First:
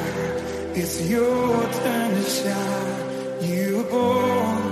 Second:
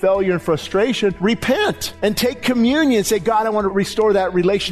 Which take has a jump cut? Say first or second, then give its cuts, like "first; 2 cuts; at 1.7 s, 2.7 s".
second; 3 cuts; at 1.2 s, 1.9 s, 3.7 s